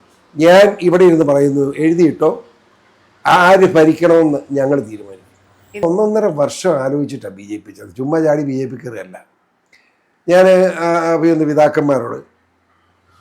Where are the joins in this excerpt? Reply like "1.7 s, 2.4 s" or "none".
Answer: 5.8 s